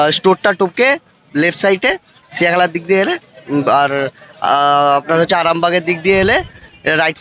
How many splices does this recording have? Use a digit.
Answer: 0